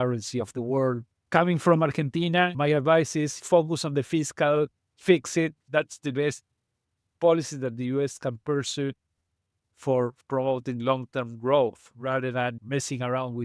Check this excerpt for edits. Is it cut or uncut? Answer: cut